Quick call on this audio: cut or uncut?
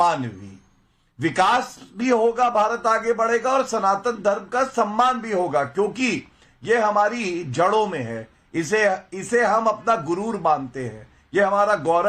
uncut